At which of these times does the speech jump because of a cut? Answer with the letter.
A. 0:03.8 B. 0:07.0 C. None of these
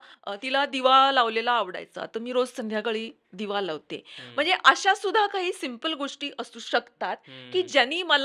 C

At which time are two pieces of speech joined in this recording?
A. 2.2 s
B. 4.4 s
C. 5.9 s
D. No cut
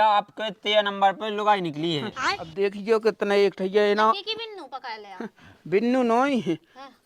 A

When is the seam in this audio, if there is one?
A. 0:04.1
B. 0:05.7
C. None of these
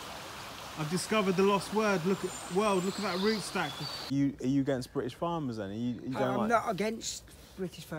A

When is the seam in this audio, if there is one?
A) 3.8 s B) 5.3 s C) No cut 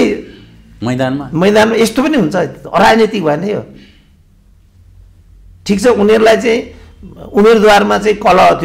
C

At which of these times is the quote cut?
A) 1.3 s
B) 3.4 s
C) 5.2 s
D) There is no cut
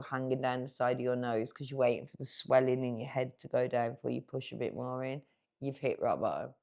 D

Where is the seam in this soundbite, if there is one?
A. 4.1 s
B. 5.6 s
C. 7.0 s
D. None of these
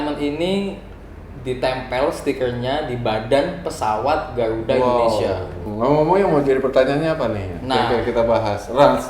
B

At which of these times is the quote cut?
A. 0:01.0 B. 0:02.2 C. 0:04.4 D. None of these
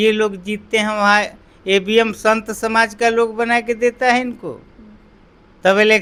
D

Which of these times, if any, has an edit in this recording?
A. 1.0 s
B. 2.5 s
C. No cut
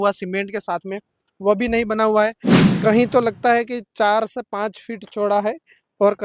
B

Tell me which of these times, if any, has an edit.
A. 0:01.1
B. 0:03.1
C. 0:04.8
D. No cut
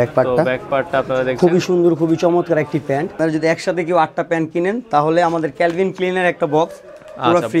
B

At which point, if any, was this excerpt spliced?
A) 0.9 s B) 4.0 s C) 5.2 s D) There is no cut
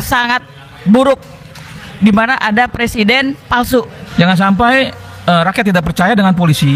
B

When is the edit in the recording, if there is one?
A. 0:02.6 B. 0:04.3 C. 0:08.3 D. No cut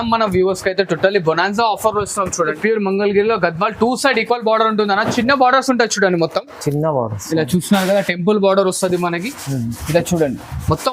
A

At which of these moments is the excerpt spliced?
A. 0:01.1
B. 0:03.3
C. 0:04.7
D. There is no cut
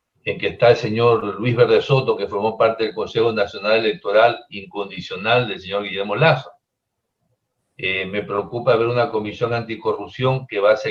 D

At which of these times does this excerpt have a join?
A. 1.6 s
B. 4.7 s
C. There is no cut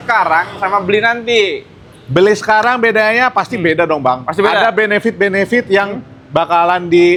C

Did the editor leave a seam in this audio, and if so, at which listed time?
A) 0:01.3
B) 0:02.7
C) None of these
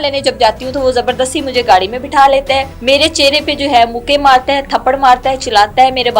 B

